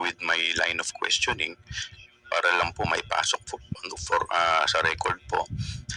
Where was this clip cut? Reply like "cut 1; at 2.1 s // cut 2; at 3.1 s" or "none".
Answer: none